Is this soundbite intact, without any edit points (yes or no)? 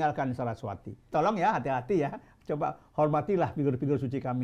no